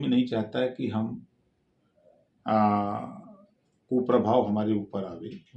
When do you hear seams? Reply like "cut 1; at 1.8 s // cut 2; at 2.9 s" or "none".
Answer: none

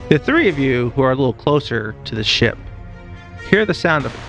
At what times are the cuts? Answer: none

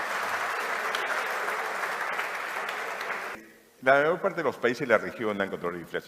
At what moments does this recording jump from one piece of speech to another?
cut 1; at 3.3 s

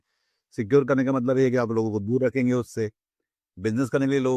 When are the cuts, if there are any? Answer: none

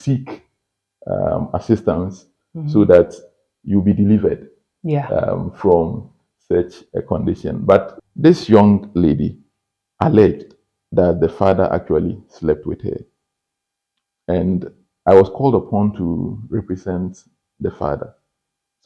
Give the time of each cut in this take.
cut 1; at 7.9 s

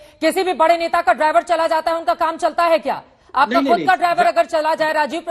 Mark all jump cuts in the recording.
none

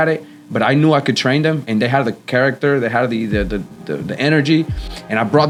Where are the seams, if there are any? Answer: none

